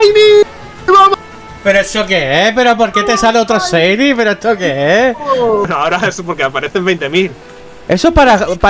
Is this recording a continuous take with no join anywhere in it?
no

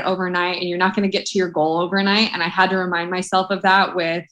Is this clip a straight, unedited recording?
yes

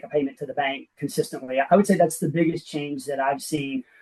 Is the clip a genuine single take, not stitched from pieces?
yes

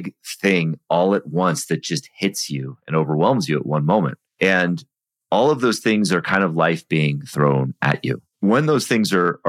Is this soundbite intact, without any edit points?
no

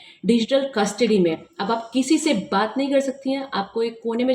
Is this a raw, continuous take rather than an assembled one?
yes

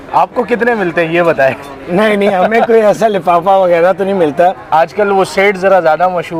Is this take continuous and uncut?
yes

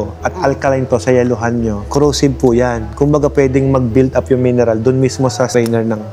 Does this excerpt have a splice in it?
no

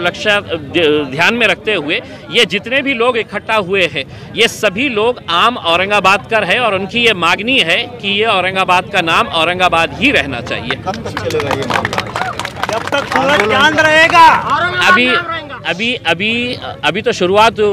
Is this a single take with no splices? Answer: yes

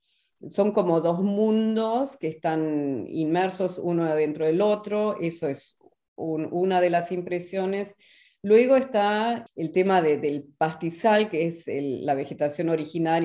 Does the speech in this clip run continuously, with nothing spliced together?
yes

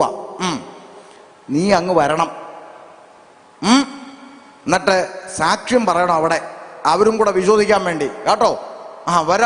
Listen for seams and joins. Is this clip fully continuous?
yes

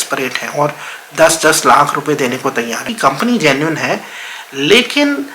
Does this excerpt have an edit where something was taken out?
yes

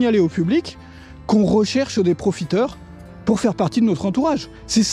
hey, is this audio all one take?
yes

